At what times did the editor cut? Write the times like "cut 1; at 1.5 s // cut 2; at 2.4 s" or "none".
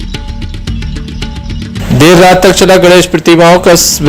cut 1; at 1.8 s